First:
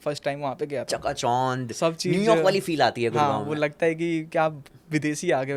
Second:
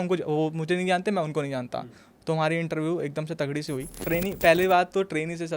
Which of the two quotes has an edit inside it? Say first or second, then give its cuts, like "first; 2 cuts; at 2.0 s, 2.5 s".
second; 1 cut; at 3.9 s